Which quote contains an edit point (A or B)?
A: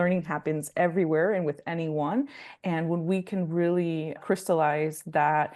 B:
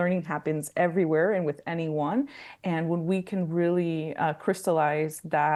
A